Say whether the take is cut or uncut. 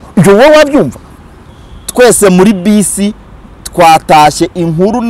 cut